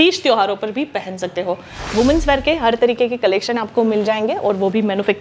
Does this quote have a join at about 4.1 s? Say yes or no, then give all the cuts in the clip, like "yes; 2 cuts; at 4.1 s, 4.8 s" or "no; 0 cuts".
no; 1 cut; at 1.7 s